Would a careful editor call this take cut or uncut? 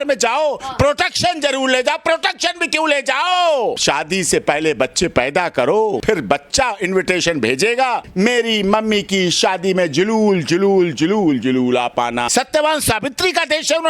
cut